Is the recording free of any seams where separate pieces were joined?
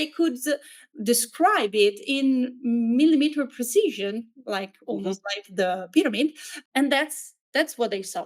yes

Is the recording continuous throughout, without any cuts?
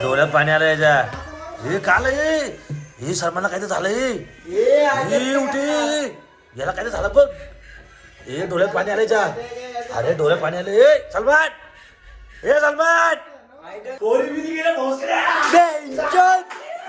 yes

